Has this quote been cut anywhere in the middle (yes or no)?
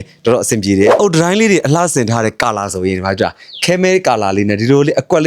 yes